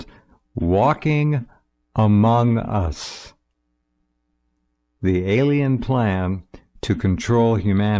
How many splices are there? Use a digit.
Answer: 1